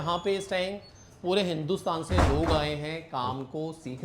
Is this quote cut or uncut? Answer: uncut